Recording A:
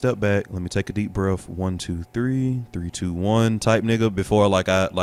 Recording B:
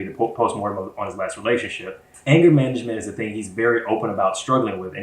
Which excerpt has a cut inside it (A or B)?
B